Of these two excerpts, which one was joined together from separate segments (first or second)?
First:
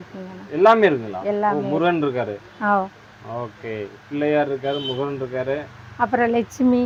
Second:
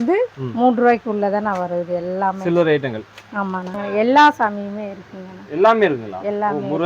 second